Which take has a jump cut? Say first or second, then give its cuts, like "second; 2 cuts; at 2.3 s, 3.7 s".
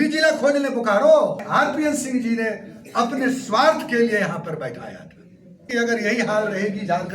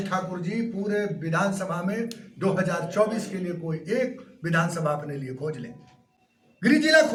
first; 2 cuts; at 1.4 s, 5.7 s